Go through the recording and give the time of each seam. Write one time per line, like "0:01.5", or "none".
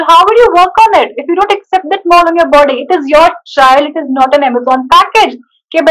none

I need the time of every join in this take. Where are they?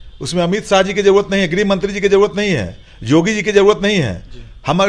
none

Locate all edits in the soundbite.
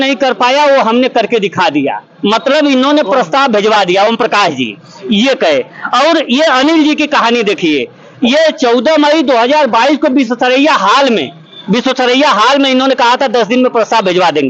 none

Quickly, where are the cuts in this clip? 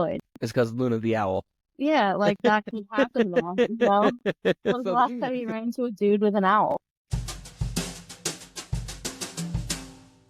0:01.6
0:07.1

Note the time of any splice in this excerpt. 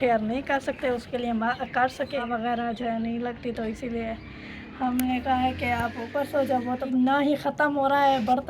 0:02.3
0:06.9

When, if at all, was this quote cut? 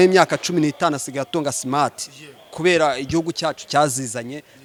none

